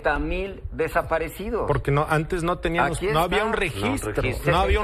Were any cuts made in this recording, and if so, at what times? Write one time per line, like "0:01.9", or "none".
none